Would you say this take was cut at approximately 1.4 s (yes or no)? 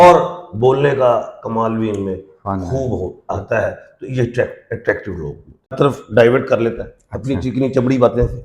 no